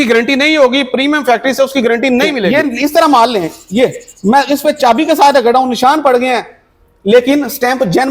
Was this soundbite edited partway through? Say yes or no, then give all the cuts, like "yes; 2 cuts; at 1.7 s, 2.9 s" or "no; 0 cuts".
yes; 1 cut; at 2.4 s